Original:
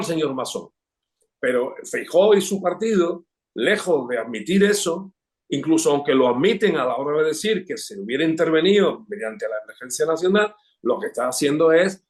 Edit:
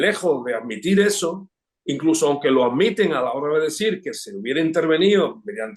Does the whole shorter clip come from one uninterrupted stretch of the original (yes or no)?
yes